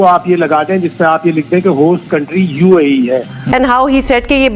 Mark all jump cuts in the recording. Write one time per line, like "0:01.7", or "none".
0:03.3